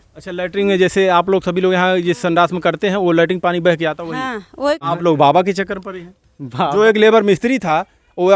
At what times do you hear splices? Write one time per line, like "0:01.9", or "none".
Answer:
0:04.8

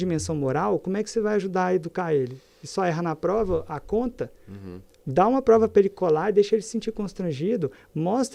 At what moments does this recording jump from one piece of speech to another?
none

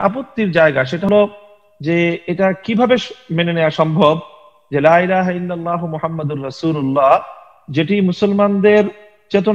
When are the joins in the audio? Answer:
0:01.1

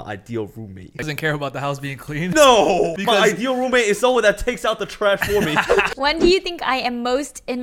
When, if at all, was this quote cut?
0:01.1
0:02.3
0:03.0
0:05.9

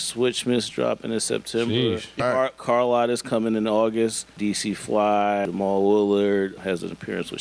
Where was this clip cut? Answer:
0:02.1
0:04.3
0:05.5
0:06.6

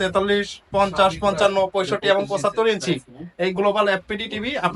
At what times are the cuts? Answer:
none

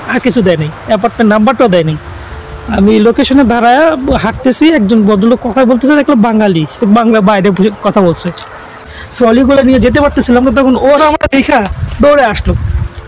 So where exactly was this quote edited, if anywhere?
0:08.8

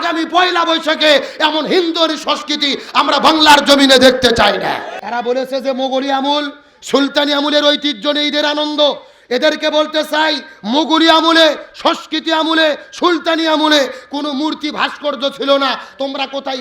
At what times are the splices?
0:04.9

